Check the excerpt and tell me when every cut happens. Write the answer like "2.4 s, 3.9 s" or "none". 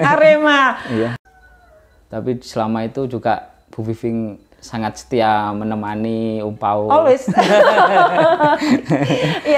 1.2 s